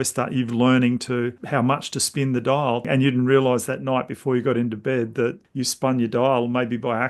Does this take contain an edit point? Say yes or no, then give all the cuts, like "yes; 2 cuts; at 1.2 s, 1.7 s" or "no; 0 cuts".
yes; 3 cuts; at 1.4 s, 2.8 s, 5.4 s